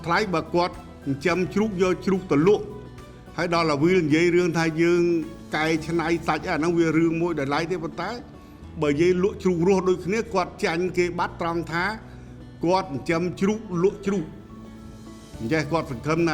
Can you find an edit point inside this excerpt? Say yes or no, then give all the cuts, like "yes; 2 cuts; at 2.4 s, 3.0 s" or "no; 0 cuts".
no; 0 cuts